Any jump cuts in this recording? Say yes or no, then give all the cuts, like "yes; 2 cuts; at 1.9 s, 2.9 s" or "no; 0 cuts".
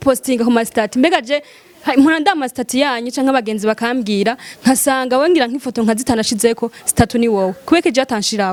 no; 0 cuts